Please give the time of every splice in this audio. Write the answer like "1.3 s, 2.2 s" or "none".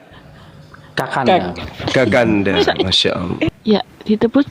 3.6 s